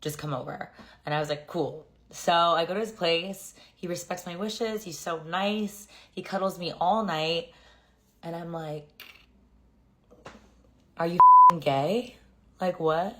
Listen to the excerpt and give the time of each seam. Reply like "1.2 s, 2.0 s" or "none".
4.3 s